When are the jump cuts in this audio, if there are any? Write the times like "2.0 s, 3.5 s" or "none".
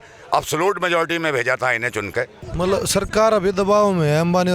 2.4 s